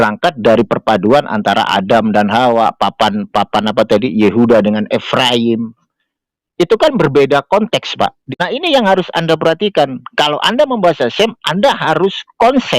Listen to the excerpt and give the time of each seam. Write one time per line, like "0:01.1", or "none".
0:08.2